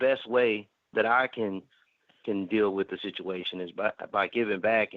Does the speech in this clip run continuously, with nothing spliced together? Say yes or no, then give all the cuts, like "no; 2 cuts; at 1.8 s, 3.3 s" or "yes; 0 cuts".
no; 1 cut; at 0.9 s